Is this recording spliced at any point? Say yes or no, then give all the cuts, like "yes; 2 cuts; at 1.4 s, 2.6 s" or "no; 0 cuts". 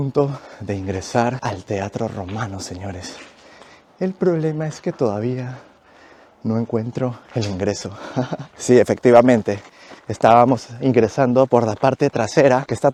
no; 0 cuts